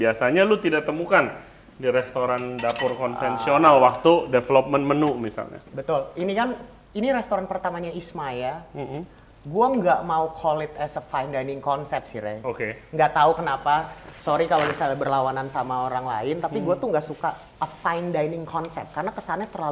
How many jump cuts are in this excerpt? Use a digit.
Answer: 0